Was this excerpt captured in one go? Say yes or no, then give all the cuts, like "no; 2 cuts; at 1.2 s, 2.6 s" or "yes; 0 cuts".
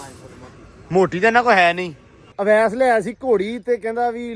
no; 1 cut; at 2.3 s